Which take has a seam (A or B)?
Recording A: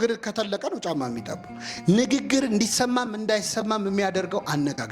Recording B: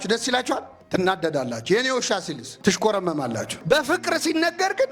B